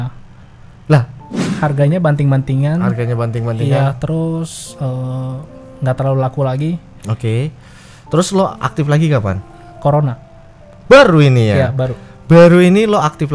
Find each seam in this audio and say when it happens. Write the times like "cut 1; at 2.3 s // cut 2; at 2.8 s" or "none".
cut 1; at 1.4 s

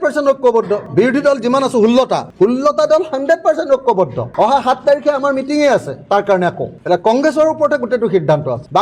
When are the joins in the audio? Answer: none

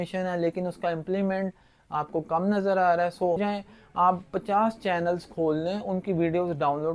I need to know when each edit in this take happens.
cut 1; at 3.4 s

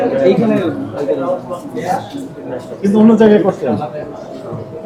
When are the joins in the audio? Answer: none

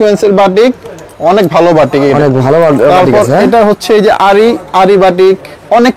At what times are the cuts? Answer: none

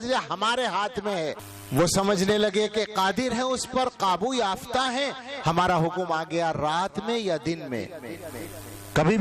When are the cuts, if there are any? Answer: cut 1; at 1.5 s

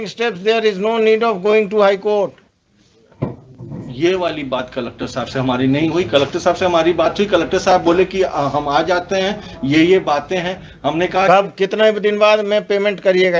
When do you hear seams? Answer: none

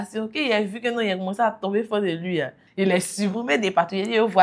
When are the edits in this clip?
cut 1; at 2.6 s

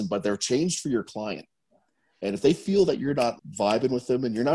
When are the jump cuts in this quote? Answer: cut 1; at 3.3 s

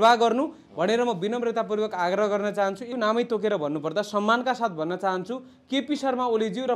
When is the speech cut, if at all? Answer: cut 1; at 2.9 s

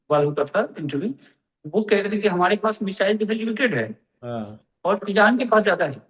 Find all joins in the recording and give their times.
none

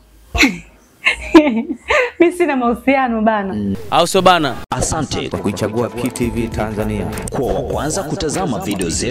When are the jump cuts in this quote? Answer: cut 1; at 3.7 s

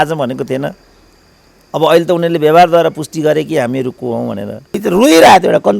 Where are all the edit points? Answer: cut 1; at 4.8 s

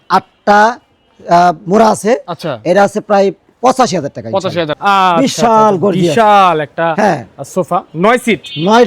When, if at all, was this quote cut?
cut 1; at 4.7 s

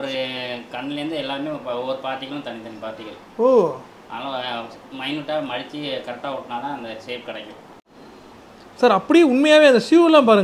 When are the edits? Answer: cut 1; at 7.8 s

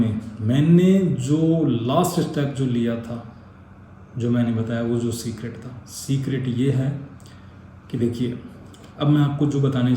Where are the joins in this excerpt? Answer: none

